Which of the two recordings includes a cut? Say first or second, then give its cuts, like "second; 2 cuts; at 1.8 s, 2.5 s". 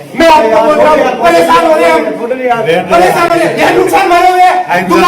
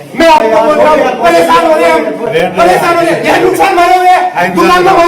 second; 1 cut; at 2.3 s